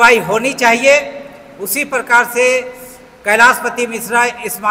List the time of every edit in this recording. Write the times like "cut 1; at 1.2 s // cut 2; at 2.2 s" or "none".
none